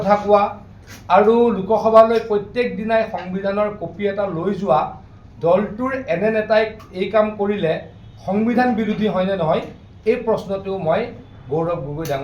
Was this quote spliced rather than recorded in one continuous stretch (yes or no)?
no